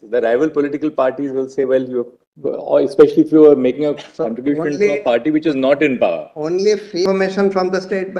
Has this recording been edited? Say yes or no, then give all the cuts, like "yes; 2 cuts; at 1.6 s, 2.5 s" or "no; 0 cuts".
yes; 1 cut; at 7.0 s